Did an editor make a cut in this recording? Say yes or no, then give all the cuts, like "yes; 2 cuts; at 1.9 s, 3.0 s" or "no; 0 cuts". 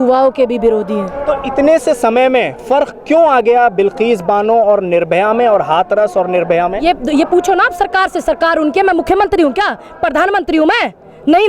no; 0 cuts